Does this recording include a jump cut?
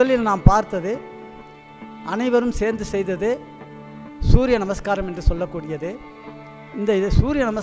no; 0 cuts

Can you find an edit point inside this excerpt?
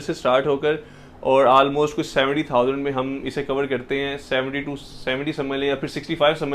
no; 0 cuts

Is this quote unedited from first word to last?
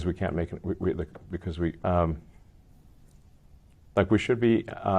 no; 1 cut; at 1.8 s

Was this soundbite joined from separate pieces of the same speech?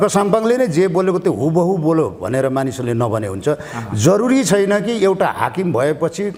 no; 0 cuts

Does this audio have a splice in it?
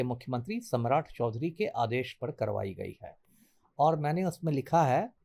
no; 0 cuts

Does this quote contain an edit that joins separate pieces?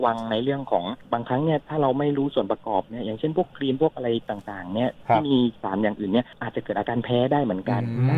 no; 0 cuts

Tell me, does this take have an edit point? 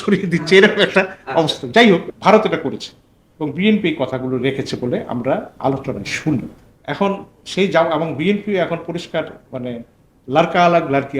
yes; 2 cuts; at 2.1 s, 6.6 s

